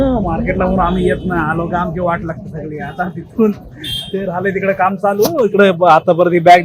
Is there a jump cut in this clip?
no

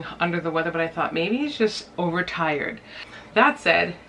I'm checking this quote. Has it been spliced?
no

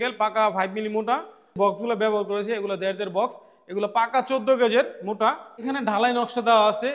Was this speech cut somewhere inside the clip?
yes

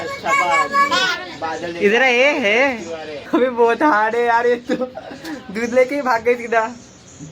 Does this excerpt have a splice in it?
yes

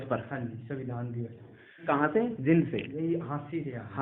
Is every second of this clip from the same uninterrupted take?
no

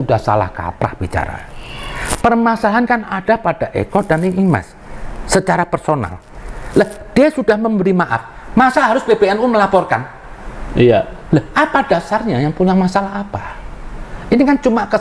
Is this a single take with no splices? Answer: yes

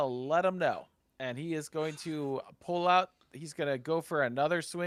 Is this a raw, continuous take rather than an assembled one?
yes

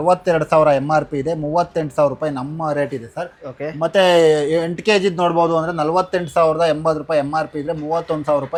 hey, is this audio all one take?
yes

